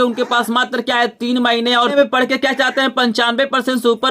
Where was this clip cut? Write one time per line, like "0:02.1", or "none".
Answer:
0:02.0